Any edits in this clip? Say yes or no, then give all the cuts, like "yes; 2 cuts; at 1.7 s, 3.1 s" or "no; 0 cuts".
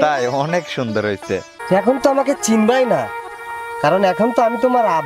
yes; 1 cut; at 1.5 s